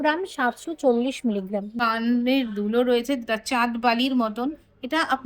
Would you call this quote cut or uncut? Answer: cut